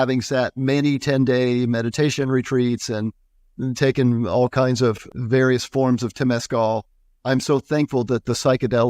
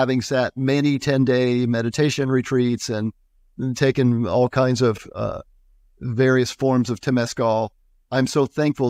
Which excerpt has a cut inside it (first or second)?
first